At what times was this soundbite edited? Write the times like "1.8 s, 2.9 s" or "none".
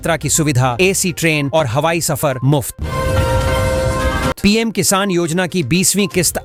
none